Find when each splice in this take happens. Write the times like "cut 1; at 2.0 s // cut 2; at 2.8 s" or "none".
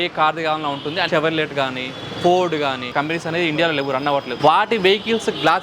cut 1; at 1.1 s // cut 2; at 2.9 s // cut 3; at 4.3 s